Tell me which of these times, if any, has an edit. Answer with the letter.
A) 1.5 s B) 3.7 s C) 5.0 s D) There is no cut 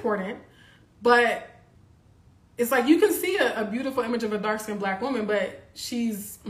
D